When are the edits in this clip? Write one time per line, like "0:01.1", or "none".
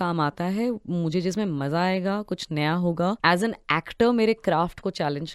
0:03.2